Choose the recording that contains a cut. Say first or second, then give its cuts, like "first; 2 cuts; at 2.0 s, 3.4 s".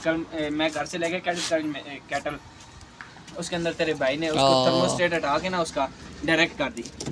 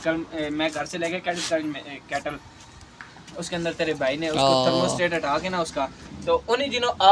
second; 1 cut; at 6.1 s